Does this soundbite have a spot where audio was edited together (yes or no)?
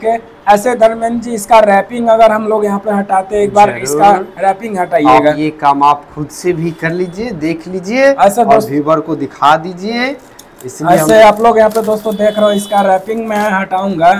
no